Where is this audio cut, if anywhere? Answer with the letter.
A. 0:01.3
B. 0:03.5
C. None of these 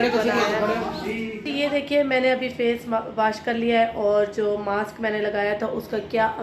A